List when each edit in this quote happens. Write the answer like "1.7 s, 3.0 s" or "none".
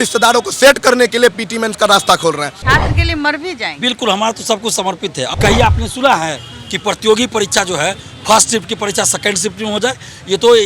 2.5 s, 5.3 s